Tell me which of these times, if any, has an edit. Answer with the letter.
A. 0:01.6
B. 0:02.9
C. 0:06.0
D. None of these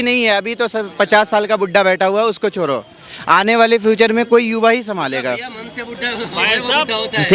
D